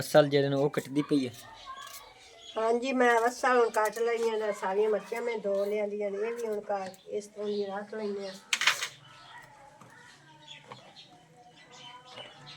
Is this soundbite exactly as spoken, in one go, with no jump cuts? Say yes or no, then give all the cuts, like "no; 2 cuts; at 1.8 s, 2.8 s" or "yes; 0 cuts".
yes; 0 cuts